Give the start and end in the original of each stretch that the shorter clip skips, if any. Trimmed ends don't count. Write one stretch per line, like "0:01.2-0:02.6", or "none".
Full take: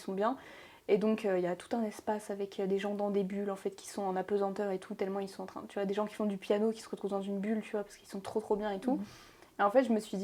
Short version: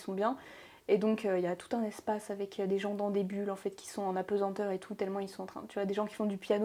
none